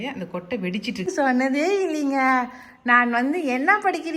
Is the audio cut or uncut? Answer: cut